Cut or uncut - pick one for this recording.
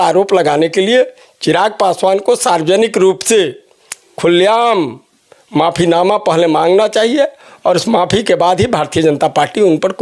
uncut